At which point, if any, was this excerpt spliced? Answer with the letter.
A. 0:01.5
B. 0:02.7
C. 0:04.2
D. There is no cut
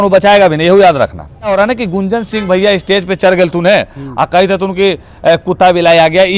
A